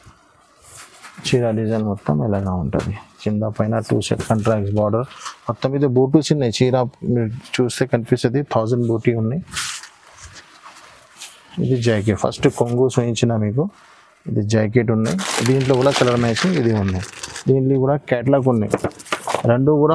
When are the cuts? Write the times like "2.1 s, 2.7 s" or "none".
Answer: none